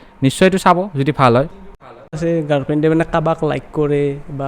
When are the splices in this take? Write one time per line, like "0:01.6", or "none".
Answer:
0:02.2